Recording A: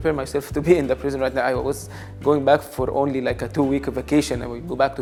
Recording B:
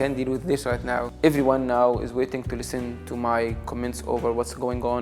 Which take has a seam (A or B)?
B